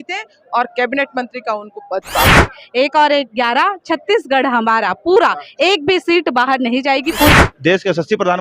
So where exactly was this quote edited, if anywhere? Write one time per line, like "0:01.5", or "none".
0:02.5
0:07.3